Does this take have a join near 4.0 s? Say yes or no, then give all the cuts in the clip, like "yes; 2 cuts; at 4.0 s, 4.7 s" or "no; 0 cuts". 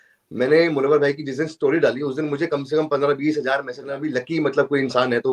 yes; 1 cut; at 4.0 s